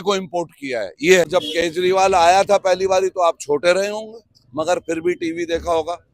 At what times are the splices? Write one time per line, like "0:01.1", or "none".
0:01.2